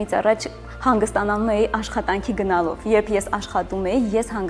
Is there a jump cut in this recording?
no; 0 cuts

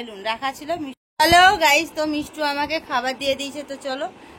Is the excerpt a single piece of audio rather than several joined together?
no; 1 cut; at 1.0 s

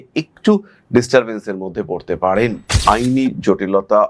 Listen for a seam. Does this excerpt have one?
yes; 1 cut; at 2.7 s

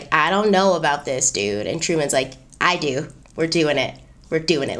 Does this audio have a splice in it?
yes; 1 cut; at 3.2 s

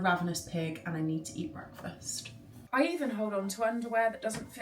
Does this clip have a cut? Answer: yes; 1 cut; at 2.6 s

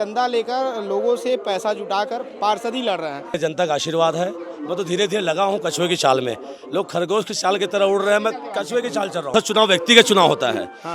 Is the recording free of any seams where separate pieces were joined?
no; 2 cuts; at 3.4 s, 9.3 s

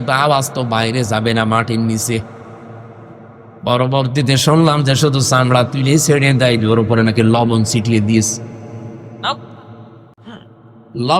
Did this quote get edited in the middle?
yes; 1 cut; at 10.1 s

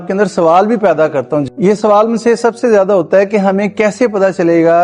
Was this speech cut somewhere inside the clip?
yes; 1 cut; at 1.5 s

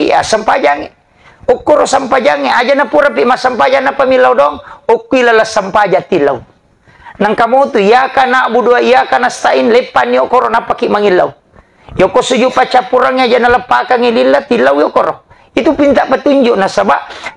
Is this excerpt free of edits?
yes; 0 cuts

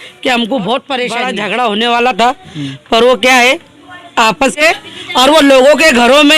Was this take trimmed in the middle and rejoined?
yes; 2 cuts; at 1.2 s, 4.6 s

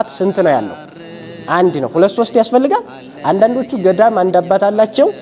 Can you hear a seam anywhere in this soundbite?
no; 0 cuts

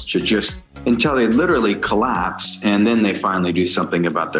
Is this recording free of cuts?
yes; 0 cuts

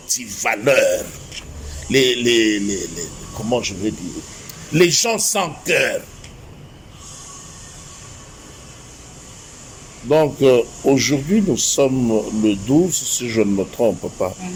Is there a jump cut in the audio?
no; 0 cuts

